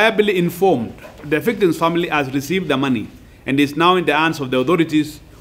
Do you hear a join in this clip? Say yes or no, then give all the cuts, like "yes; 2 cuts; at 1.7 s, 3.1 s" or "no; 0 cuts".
yes; 1 cut; at 1.2 s